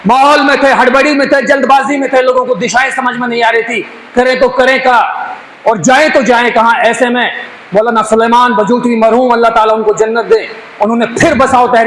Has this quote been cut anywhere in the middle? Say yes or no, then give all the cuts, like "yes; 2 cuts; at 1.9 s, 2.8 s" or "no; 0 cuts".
no; 0 cuts